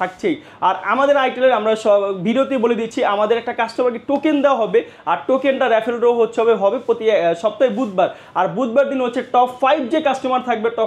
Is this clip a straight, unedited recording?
yes; 0 cuts

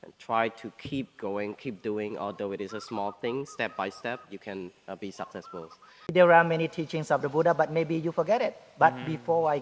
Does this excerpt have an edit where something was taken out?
yes; 1 cut; at 6.1 s

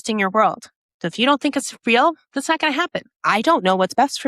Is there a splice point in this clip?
yes; 1 cut; at 3.1 s

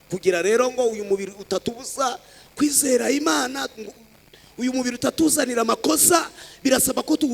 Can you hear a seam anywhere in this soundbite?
no; 0 cuts

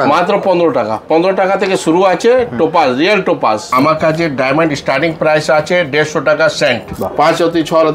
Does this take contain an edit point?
yes; 2 cuts; at 3.7 s, 6.9 s

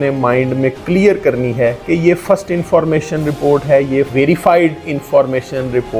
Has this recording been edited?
yes; 2 cuts; at 1.8 s, 4.1 s

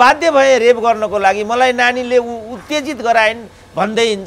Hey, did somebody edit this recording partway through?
no; 0 cuts

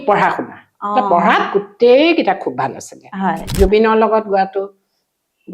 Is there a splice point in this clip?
yes; 1 cut; at 3.5 s

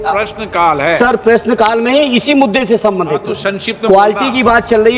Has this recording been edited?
no; 0 cuts

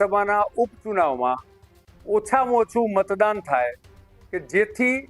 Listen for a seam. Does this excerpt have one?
no; 0 cuts

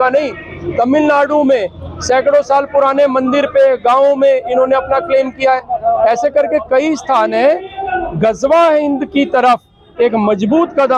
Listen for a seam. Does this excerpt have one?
no; 0 cuts

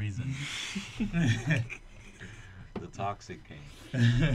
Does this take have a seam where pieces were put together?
no; 0 cuts

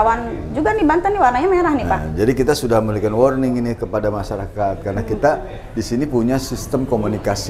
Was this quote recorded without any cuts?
yes; 0 cuts

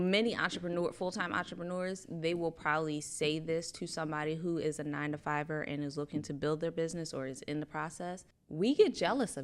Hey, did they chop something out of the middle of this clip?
yes; 1 cut; at 8.3 s

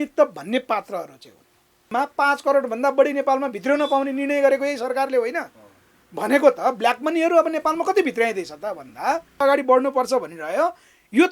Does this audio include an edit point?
yes; 2 cuts; at 1.9 s, 9.4 s

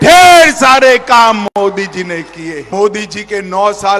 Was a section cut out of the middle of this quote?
yes; 1 cut; at 2.7 s

